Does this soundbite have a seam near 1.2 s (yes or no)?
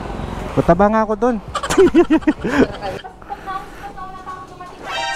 no